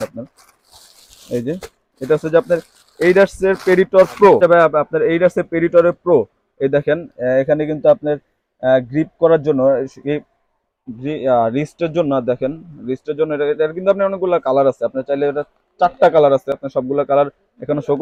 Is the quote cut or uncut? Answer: uncut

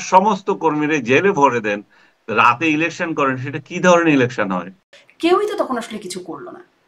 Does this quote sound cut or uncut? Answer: cut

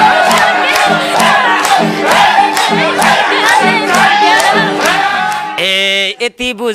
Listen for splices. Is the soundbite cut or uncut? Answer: cut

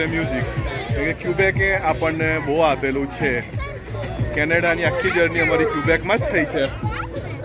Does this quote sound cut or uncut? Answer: uncut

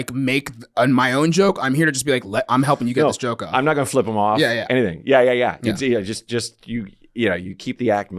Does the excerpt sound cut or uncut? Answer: uncut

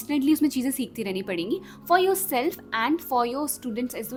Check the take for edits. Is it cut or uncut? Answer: uncut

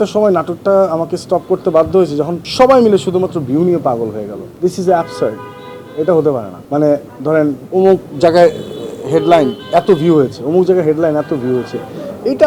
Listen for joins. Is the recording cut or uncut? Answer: cut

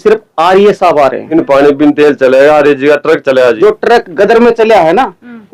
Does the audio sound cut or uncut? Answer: cut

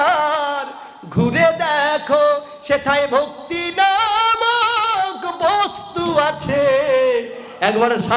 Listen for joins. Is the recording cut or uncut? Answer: uncut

